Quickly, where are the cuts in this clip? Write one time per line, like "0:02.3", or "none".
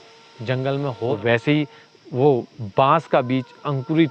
0:01.1